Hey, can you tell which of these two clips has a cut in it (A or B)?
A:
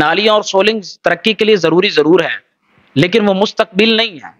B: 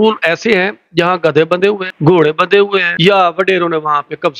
B